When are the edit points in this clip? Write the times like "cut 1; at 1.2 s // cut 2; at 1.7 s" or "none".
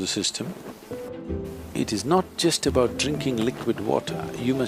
cut 1; at 1.1 s